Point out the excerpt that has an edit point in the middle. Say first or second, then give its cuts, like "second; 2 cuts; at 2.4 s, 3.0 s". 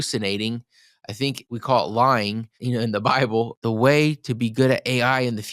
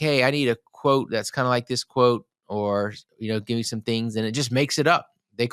first; 3 cuts; at 1.4 s, 2.6 s, 3.5 s